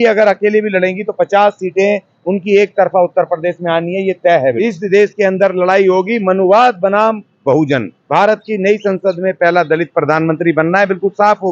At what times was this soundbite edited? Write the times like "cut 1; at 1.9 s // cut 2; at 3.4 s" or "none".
cut 1; at 4.5 s // cut 2; at 8.0 s